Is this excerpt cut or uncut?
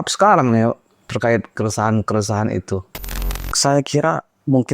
cut